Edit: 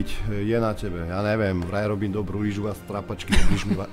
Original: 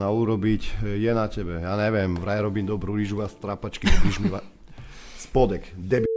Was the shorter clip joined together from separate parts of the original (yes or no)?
no